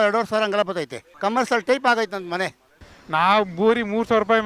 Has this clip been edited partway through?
yes; 2 cuts; at 1.0 s, 2.8 s

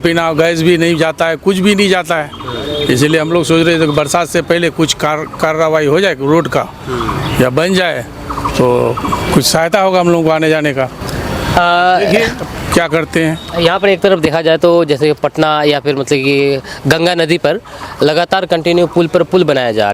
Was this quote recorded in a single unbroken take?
yes; 0 cuts

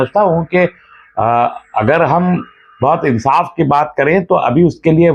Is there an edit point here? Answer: no; 0 cuts

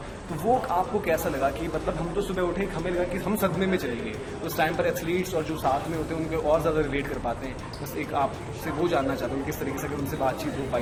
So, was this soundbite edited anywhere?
no; 0 cuts

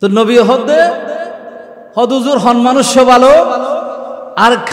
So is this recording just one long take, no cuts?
yes; 0 cuts

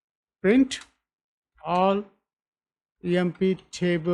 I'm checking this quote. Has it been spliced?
no; 0 cuts

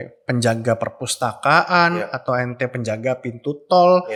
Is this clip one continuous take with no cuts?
yes; 0 cuts

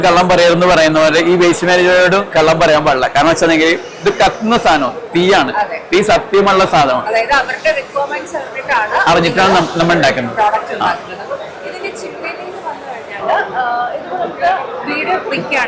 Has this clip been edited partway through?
no; 0 cuts

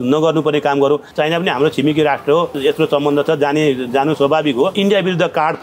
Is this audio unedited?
no; 3 cuts; at 1.1 s, 2.5 s, 4.7 s

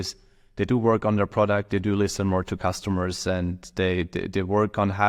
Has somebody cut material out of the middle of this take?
no; 0 cuts

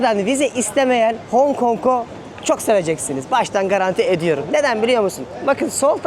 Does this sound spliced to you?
no; 0 cuts

